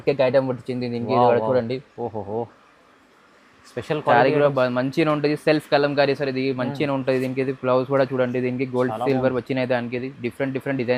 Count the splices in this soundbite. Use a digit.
0